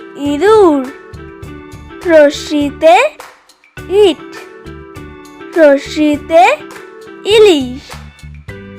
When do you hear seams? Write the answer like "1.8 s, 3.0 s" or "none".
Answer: 7.8 s